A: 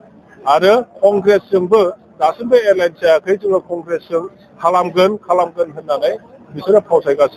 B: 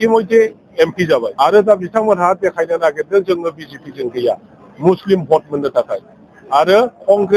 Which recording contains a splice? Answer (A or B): B